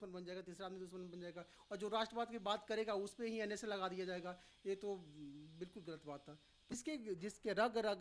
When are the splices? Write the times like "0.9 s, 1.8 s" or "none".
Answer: 6.5 s